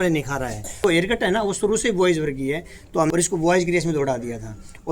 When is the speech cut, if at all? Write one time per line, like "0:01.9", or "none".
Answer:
0:00.8
0:03.1